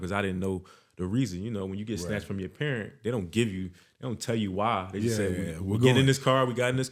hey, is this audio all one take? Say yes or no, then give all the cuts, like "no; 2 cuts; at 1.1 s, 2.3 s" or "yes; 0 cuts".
yes; 0 cuts